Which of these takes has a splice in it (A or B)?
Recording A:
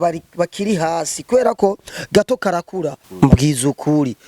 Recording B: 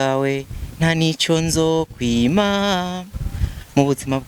A